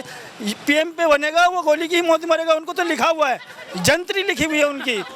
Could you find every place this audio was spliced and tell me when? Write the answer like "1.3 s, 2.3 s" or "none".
none